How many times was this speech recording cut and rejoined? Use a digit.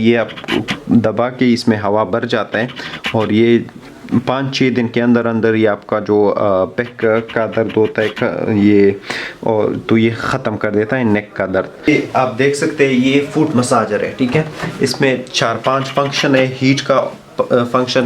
1